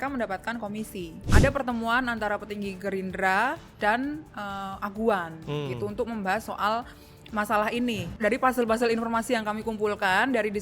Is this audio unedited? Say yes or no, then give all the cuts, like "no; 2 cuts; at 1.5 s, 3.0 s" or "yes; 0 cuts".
no; 2 cuts; at 1.2 s, 8.1 s